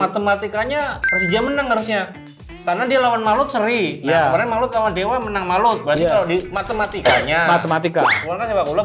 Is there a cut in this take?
no; 0 cuts

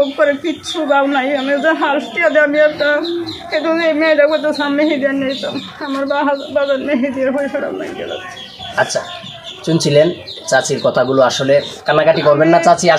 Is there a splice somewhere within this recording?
no; 0 cuts

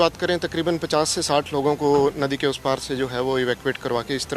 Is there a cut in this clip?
no; 0 cuts

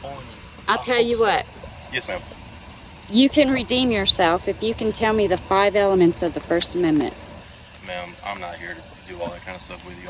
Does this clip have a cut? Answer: no; 0 cuts

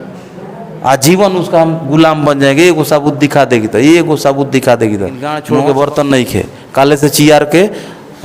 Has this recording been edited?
yes; 1 cut; at 5.3 s

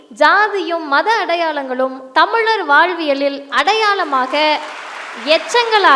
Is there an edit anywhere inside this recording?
no; 0 cuts

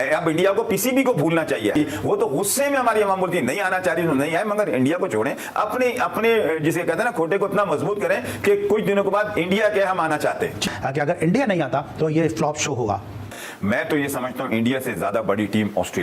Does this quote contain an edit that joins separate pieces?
no; 0 cuts

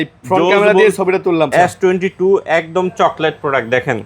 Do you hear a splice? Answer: yes; 1 cut; at 1.5 s

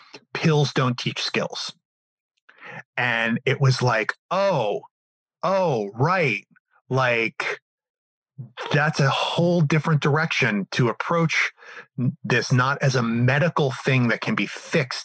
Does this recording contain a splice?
no; 0 cuts

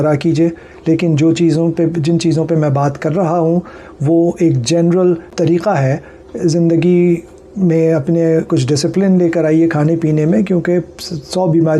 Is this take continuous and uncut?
no; 1 cut; at 5.3 s

